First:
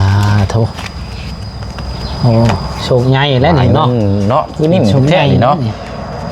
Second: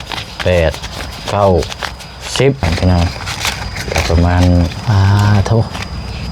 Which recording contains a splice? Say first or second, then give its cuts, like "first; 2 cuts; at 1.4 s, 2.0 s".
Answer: second; 1 cut; at 2.6 s